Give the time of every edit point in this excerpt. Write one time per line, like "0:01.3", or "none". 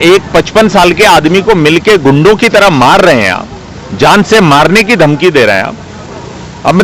none